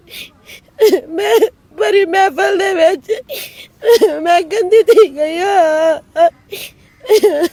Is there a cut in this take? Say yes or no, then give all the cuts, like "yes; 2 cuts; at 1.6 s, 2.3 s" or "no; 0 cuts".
no; 0 cuts